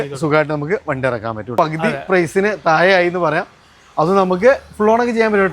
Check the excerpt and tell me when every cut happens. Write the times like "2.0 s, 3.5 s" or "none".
1.5 s

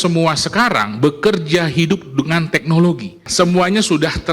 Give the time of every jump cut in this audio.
3.3 s

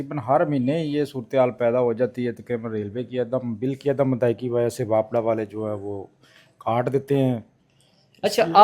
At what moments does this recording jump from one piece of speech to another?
none

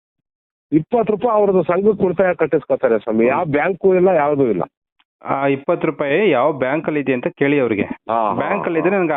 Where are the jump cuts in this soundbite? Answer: 8.0 s

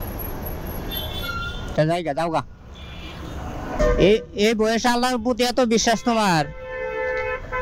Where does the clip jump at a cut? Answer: 3.8 s

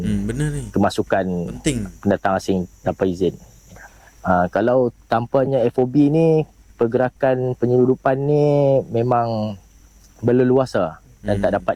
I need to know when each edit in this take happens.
none

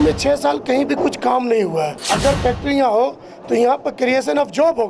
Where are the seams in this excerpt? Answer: 2.0 s

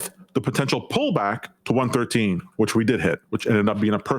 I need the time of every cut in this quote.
3.2 s

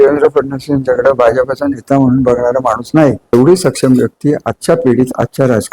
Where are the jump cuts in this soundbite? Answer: 3.3 s

